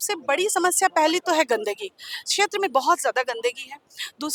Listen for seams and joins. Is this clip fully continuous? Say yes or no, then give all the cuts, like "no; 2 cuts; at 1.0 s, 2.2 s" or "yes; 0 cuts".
yes; 0 cuts